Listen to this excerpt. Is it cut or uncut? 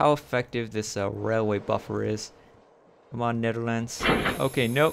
uncut